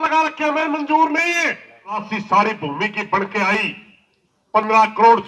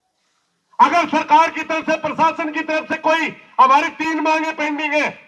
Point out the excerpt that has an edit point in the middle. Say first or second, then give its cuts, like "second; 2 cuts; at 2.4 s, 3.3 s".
first; 1 cut; at 2.1 s